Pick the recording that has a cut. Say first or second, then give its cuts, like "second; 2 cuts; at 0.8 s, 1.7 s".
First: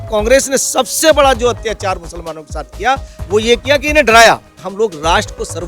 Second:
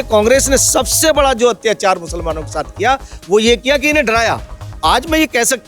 first; 1 cut; at 4.6 s